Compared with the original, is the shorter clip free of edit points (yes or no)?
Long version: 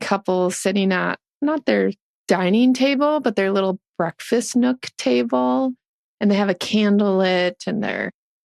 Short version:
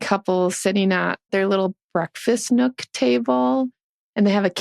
no